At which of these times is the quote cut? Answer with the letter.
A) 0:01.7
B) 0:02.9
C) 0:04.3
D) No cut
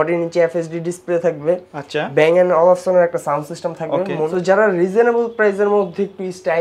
C